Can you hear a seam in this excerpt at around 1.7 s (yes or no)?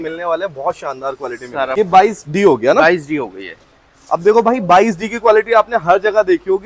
yes